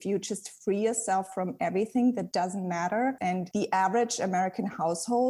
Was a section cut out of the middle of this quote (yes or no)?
yes